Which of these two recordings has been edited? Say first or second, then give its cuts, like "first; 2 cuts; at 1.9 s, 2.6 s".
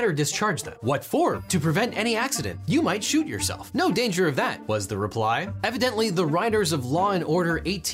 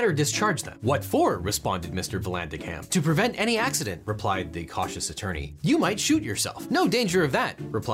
first; 3 cuts; at 1.4 s, 2.5 s, 4.6 s